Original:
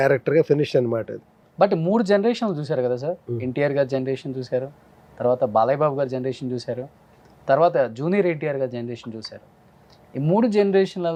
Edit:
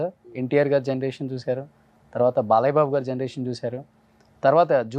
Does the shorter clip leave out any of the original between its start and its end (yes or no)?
no